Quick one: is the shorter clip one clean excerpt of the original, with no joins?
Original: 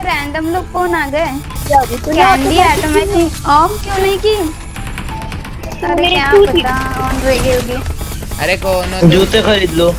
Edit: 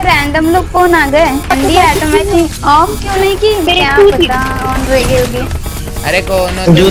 no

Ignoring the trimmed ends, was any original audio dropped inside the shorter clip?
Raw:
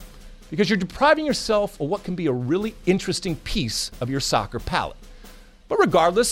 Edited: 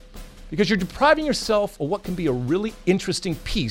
no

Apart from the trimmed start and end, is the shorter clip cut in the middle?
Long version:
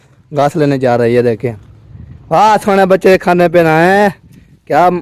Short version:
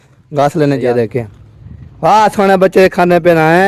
yes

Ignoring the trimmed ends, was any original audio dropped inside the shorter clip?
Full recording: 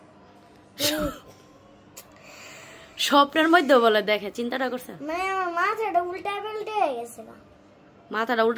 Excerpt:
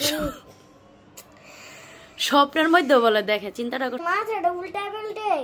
yes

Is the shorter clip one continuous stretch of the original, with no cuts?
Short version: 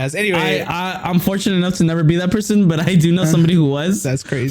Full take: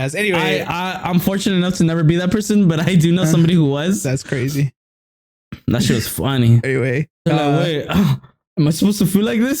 yes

